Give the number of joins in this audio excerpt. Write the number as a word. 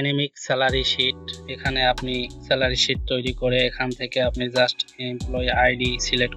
one